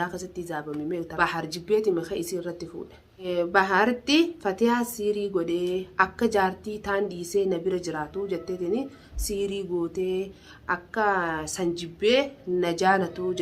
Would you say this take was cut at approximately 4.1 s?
no; 1 cut; at 1.2 s

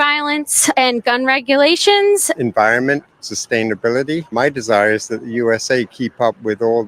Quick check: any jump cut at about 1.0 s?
yes; 1 cut; at 1.0 s

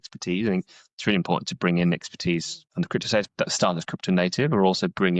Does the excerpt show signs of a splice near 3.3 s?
yes; 1 cut; at 3.3 s

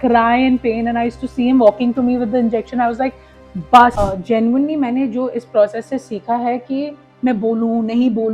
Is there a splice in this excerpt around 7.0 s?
yes; 2 cuts; at 3.9 s, 7.0 s

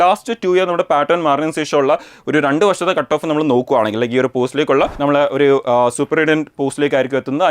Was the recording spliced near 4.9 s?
yes; 1 cut; at 4.9 s

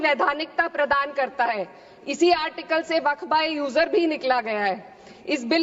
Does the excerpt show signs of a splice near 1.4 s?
no; 0 cuts

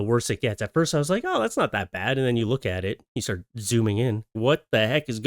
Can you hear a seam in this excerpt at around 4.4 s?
yes; 1 cut; at 4.4 s

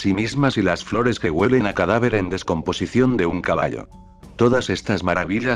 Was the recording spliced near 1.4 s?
yes; 1 cut; at 1.4 s

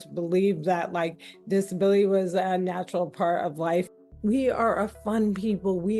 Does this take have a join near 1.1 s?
no; 1 cut; at 3.9 s

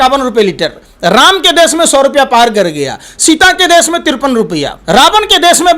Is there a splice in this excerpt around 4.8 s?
yes; 1 cut; at 4.8 s

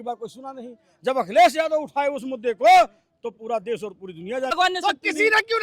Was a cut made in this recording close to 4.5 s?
yes; 1 cut; at 4.5 s

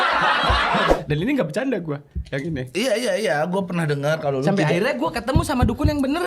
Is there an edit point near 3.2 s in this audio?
no; 1 cut; at 0.9 s

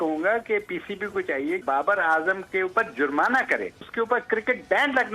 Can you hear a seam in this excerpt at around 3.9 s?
yes; 2 cuts; at 1.6 s, 3.9 s

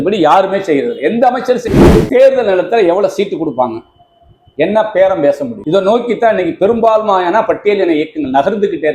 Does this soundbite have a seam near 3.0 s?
no; 2 cuts; at 1.6 s, 5.5 s

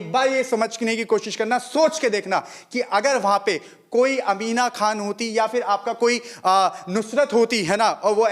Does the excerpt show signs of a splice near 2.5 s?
no; 0 cuts

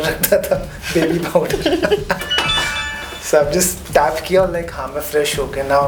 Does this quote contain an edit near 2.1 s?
no; 0 cuts

